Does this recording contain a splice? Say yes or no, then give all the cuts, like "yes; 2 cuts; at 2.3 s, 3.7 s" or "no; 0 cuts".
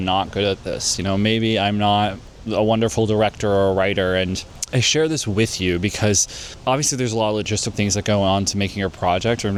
no; 0 cuts